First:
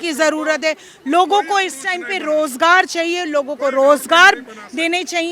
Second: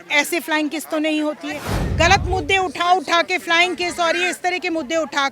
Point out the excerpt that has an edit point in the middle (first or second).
second